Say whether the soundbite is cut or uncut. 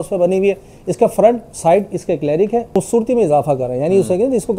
cut